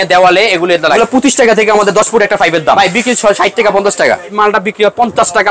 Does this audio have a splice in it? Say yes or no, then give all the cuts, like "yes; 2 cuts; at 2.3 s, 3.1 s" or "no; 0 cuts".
yes; 3 cuts; at 1.0 s, 2.8 s, 4.3 s